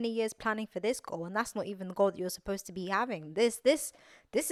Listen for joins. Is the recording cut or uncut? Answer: uncut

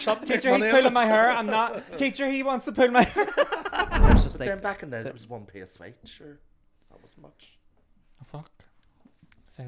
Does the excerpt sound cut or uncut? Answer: cut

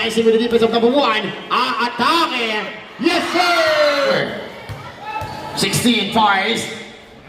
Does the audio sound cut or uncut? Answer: cut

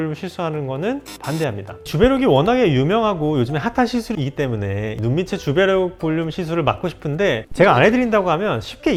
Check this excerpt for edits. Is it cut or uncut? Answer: uncut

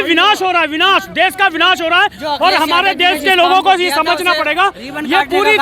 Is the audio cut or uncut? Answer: uncut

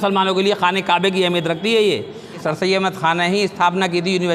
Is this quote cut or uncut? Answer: cut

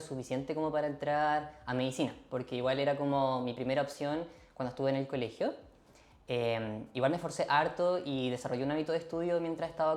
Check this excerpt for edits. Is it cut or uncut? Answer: uncut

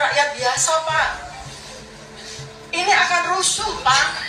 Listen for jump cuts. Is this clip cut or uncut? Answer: uncut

